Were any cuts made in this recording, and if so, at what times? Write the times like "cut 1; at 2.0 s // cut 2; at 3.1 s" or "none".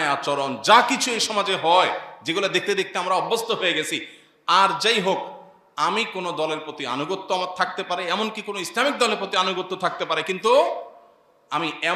none